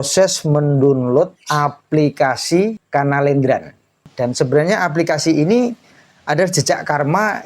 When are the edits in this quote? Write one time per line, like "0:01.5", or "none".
0:01.4
0:02.8
0:04.0